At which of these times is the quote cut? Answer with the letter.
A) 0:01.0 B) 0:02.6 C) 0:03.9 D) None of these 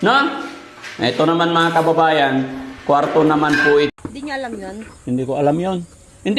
C